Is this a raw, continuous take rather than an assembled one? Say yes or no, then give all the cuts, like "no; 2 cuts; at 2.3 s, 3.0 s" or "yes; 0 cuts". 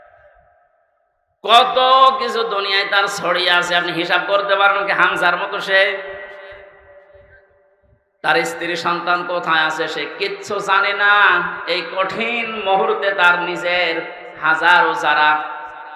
yes; 0 cuts